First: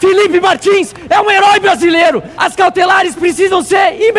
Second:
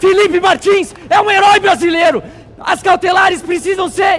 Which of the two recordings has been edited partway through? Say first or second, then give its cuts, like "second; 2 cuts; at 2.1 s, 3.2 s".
first; 1 cut; at 2.4 s